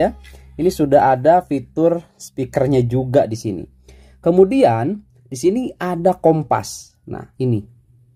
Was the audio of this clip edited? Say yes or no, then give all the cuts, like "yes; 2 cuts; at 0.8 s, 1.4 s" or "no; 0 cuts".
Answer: no; 0 cuts